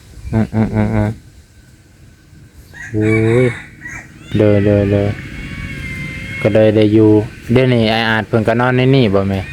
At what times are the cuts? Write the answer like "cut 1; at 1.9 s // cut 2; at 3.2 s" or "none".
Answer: cut 1; at 4.2 s